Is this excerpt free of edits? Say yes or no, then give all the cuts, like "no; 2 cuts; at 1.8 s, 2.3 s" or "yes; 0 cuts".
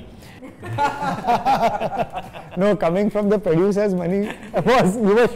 yes; 0 cuts